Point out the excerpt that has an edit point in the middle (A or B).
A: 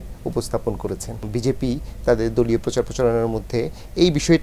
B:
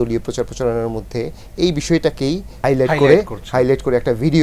A